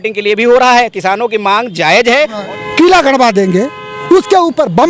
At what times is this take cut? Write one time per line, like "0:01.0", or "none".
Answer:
0:02.4